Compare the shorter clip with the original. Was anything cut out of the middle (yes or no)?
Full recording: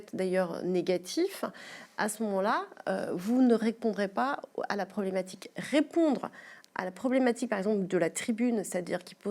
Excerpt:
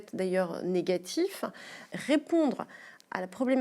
yes